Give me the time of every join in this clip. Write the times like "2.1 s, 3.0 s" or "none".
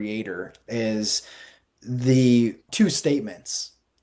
2.6 s